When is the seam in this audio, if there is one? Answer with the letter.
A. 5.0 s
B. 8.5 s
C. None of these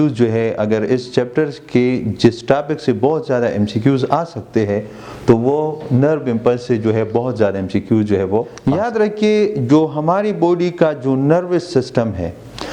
B